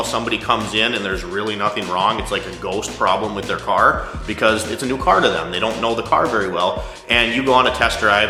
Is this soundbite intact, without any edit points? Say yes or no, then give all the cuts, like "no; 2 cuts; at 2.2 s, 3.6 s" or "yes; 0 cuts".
yes; 0 cuts